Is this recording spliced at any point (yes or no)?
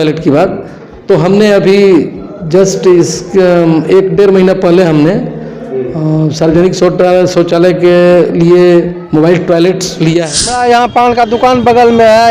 yes